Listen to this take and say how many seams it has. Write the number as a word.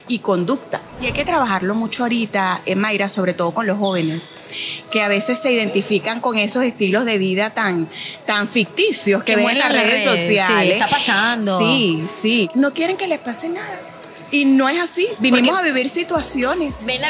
two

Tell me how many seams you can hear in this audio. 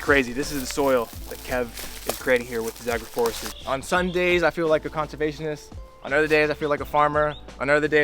one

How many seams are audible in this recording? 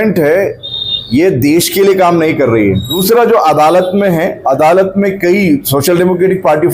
one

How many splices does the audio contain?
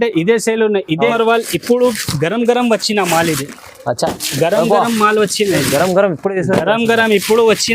one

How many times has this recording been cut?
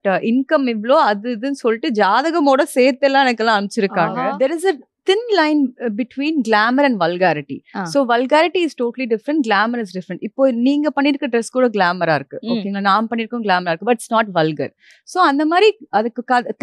one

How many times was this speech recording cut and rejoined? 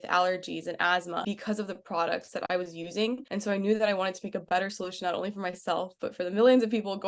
two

